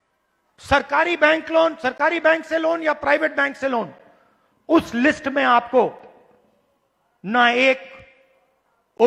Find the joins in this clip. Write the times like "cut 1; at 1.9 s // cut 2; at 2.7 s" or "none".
none